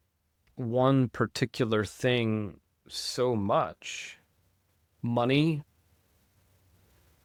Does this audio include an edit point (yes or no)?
no